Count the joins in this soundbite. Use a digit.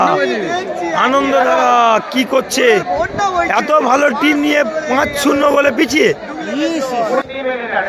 0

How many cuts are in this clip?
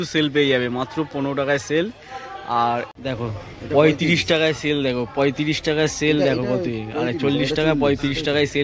1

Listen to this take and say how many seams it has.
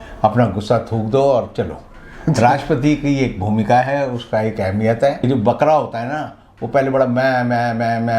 1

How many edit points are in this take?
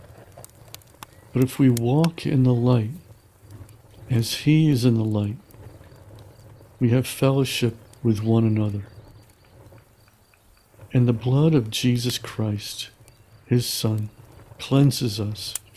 2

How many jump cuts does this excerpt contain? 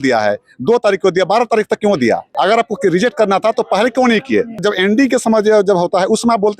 2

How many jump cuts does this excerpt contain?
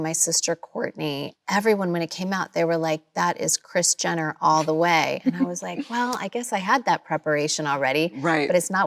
1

